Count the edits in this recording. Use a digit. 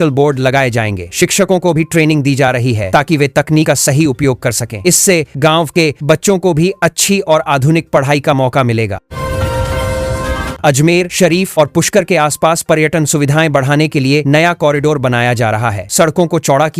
2